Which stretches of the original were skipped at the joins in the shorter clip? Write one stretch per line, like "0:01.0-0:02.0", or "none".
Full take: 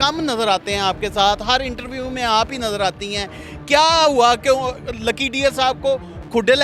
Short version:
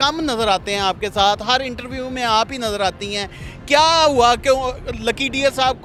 none

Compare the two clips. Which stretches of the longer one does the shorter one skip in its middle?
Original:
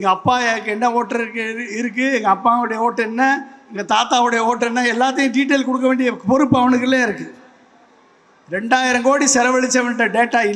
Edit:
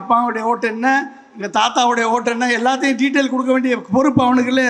none

